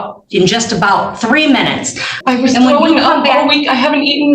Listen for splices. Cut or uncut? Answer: cut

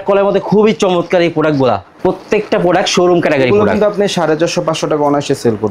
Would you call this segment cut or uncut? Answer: cut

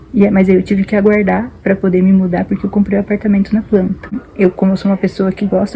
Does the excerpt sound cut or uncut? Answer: cut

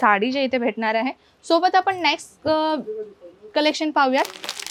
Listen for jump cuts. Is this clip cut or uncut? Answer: uncut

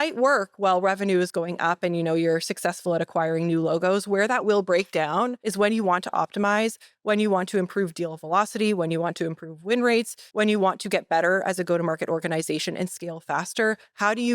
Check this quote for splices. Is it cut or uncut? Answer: cut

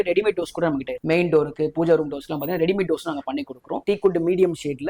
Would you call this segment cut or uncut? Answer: cut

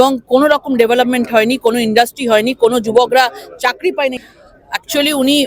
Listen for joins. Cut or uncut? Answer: cut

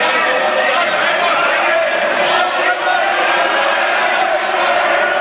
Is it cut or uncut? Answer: uncut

